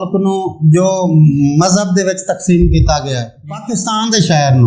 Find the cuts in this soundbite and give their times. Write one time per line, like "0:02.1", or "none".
0:03.3